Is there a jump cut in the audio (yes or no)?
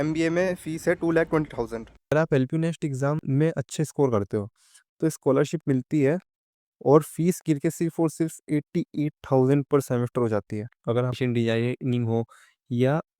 yes